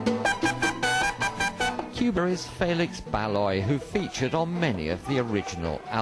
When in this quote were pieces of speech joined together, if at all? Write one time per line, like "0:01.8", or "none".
none